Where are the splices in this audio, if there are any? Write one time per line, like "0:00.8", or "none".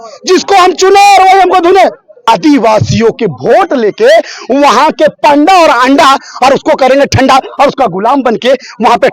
0:02.2